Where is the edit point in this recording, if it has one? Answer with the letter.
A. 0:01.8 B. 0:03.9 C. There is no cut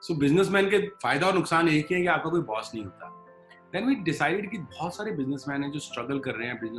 C